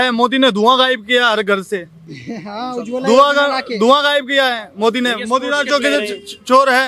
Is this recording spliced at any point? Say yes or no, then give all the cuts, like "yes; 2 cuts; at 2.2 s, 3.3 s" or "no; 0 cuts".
no; 0 cuts